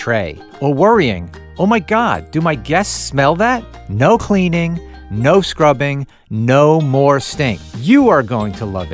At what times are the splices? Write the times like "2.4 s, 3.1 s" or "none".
3.8 s, 7.7 s